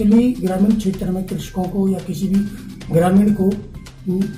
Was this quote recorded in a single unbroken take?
yes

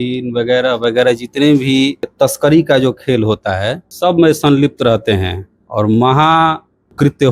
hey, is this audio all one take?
no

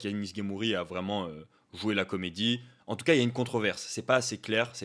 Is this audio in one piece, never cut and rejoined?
yes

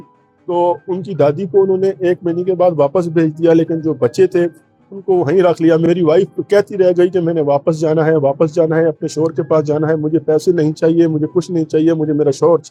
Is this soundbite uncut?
yes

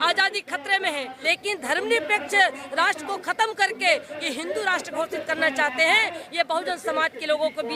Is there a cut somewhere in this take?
yes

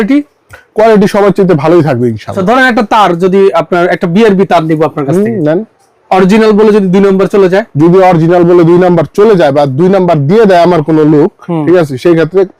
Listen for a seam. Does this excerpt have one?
yes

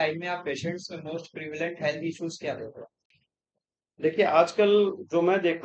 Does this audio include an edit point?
no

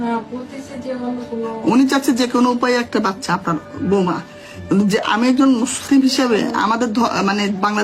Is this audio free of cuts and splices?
yes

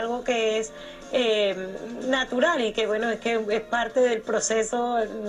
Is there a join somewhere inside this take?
no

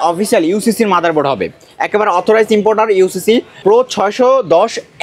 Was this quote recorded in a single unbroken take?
no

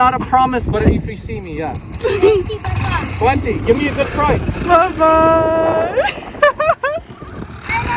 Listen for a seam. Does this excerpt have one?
no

